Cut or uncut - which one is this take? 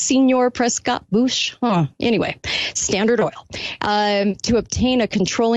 uncut